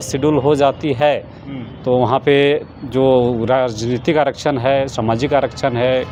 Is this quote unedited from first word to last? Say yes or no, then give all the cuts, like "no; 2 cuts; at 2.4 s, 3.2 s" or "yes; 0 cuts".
yes; 0 cuts